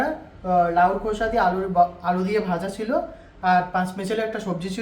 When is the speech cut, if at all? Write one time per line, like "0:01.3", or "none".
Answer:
none